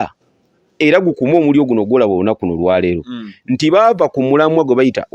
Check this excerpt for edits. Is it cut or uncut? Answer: uncut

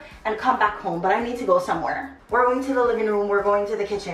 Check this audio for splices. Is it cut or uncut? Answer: cut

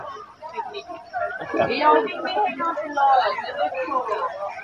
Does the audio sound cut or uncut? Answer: cut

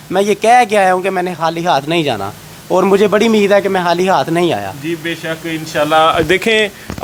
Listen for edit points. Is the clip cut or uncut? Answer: uncut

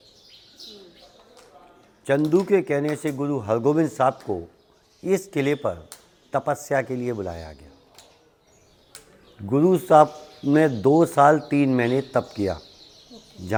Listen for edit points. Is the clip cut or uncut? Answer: uncut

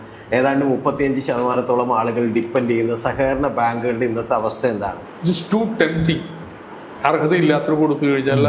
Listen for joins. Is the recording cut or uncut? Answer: cut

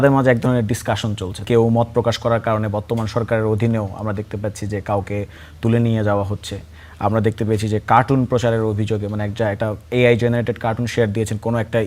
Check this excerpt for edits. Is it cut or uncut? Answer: cut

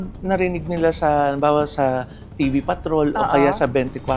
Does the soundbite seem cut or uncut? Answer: uncut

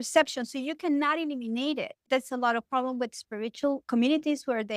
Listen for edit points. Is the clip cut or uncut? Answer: cut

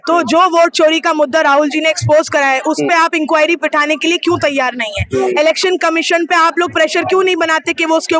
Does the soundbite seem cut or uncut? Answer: uncut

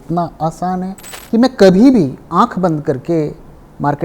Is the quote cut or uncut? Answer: cut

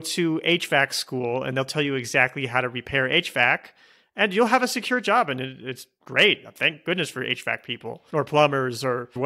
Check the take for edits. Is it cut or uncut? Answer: uncut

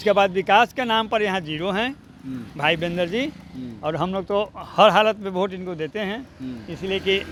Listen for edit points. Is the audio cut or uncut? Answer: uncut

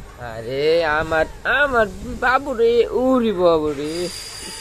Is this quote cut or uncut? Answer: uncut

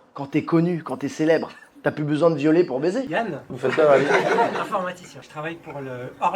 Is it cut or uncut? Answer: cut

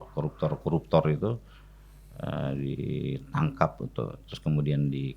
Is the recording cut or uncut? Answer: uncut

